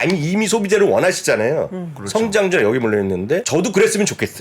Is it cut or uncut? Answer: cut